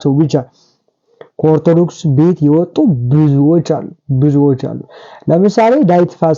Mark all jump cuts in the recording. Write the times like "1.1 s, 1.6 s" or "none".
none

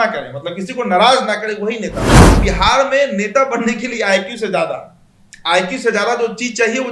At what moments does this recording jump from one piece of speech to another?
2.3 s

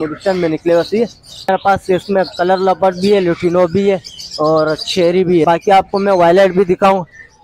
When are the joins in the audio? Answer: 1.5 s, 5.5 s

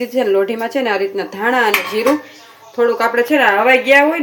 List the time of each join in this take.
none

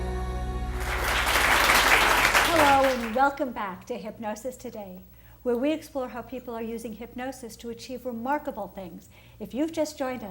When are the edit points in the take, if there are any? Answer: 3.1 s

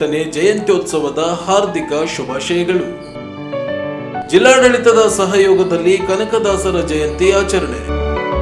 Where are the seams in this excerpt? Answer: none

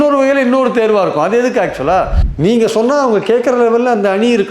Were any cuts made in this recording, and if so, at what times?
2.2 s

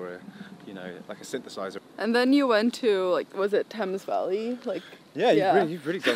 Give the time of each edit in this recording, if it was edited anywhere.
1.8 s

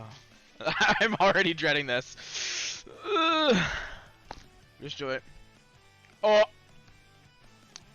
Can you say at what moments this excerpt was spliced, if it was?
6.9 s

